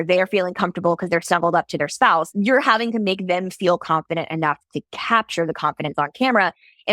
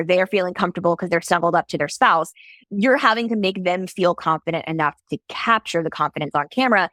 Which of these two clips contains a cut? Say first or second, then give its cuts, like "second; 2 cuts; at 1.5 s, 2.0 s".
first; 1 cut; at 2.3 s